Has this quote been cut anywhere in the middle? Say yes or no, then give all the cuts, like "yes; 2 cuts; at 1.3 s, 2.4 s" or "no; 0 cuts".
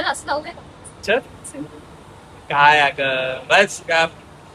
no; 0 cuts